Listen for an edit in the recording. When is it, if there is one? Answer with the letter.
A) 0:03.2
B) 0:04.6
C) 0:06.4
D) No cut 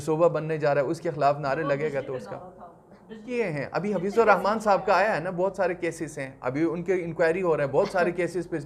A